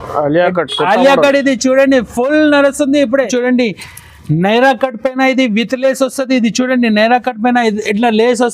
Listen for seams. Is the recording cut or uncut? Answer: cut